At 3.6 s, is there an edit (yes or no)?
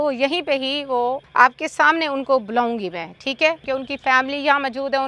yes